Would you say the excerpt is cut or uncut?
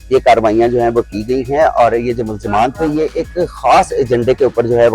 uncut